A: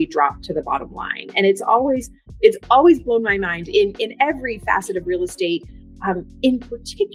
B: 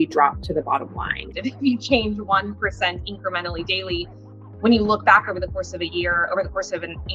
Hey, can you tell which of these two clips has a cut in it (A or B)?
B